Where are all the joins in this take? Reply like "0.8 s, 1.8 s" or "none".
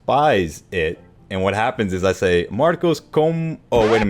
none